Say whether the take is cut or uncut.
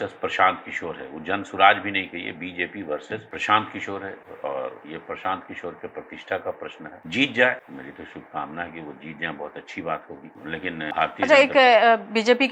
uncut